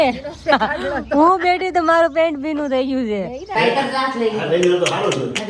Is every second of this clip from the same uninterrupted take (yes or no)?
no